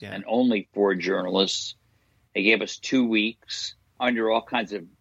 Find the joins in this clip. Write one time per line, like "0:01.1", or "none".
0:03.9